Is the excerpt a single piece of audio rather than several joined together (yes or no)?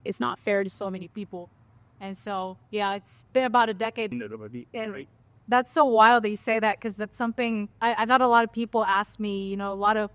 no